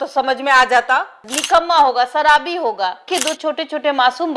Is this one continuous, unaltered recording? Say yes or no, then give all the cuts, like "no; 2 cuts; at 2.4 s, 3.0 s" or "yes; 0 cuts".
no; 2 cuts; at 1.3 s, 3.0 s